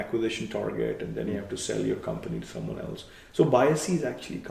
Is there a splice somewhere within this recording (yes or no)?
no